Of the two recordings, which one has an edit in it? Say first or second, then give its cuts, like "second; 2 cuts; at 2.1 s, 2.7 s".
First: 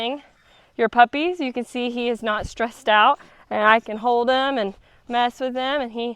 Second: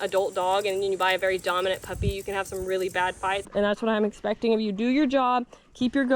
second; 1 cut; at 3.5 s